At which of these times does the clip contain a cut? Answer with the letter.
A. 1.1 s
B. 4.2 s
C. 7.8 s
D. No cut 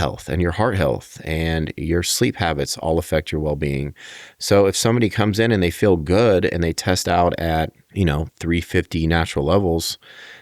C